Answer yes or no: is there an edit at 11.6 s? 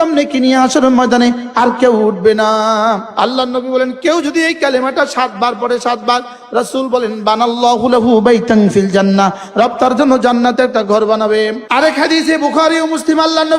yes